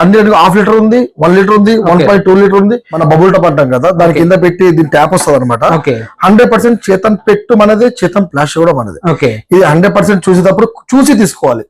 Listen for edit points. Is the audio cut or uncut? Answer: cut